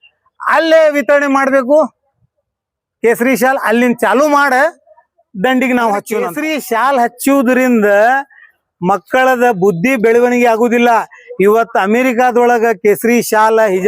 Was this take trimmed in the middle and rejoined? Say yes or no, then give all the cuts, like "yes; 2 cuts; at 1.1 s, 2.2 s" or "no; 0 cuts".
yes; 1 cut; at 6.4 s